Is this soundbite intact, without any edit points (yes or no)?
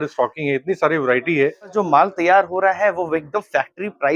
no